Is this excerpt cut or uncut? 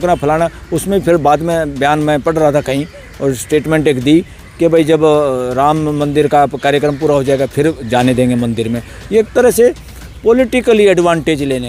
uncut